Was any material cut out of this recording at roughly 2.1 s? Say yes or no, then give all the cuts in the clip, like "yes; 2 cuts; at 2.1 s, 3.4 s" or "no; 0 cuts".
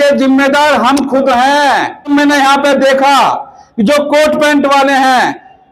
yes; 1 cut; at 2.1 s